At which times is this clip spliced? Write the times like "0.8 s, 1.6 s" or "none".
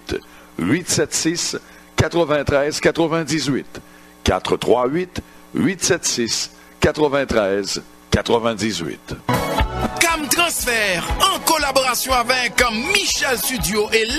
9.1 s

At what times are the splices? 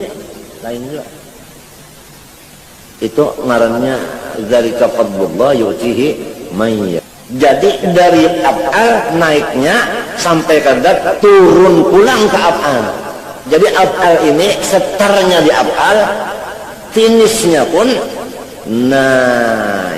7.1 s

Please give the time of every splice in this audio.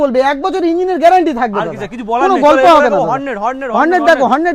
none

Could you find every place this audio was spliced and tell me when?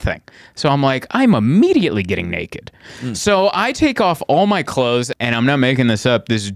5.1 s

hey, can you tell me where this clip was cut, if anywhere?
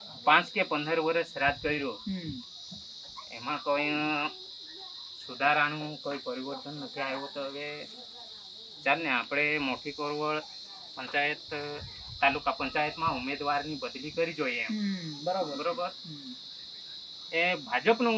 none

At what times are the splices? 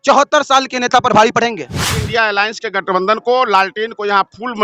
1.9 s

